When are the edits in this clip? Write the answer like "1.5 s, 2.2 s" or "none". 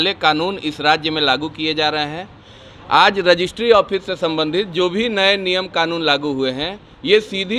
none